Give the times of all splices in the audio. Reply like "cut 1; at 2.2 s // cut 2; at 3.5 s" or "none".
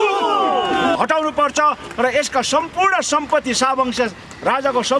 cut 1; at 0.9 s